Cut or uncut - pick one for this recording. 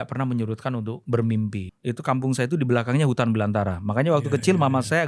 cut